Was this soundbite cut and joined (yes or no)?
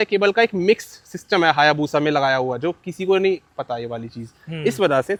no